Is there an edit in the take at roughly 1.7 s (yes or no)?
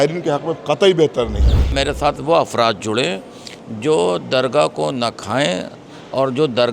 yes